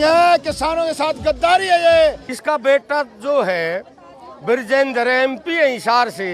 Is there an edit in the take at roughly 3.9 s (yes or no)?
no